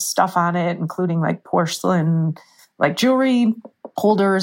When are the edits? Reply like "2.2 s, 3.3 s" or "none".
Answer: none